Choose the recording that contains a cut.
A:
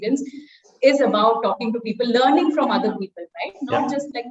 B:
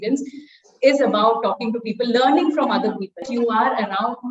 B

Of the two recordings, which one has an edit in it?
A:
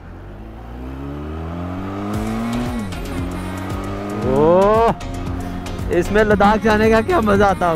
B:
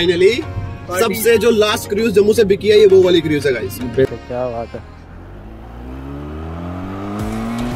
B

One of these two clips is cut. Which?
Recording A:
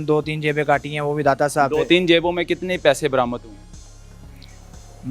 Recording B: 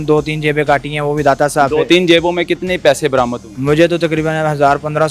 B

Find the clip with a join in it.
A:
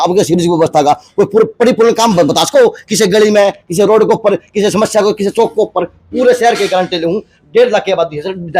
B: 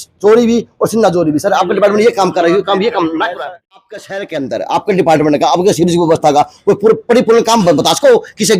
B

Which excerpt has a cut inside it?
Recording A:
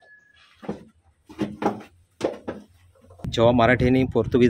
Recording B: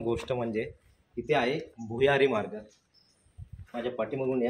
A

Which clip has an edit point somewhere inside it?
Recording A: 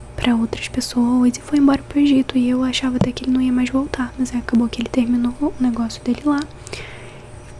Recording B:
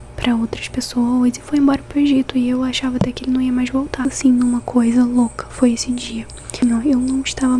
B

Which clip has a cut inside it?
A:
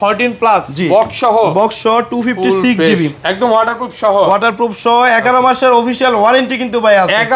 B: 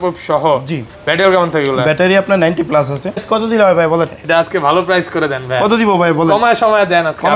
B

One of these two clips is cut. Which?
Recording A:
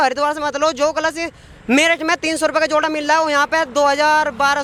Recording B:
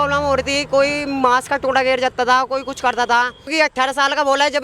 B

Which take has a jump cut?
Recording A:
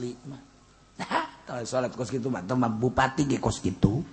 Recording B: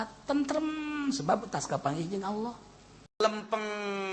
B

